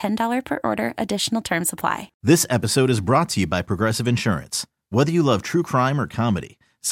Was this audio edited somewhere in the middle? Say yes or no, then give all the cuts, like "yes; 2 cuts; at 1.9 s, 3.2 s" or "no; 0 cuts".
yes; 1 cut; at 2.1 s